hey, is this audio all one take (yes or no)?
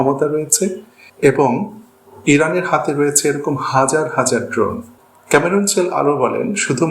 no